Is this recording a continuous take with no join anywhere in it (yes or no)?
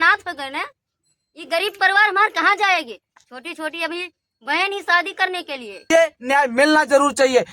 no